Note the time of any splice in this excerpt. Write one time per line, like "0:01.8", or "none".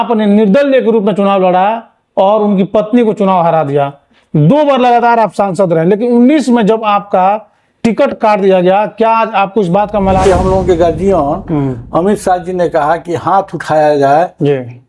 0:10.2